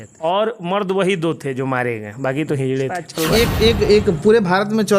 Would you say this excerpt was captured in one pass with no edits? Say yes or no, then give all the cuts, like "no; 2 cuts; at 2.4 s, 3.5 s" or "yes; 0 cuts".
no; 1 cut; at 3.1 s